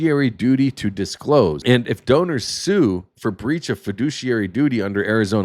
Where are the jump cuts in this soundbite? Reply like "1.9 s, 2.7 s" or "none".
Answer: 1.6 s